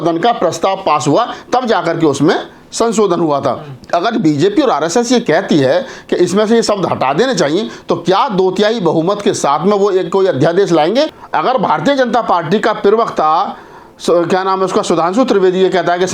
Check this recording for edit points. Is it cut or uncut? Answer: cut